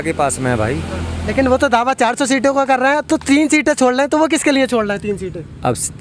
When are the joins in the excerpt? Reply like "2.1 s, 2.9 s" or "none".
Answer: none